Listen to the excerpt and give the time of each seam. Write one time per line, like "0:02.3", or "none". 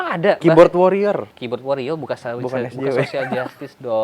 0:01.3